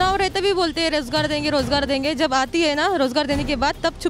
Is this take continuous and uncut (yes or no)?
yes